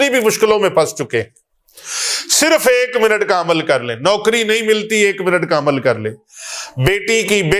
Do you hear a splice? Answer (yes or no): no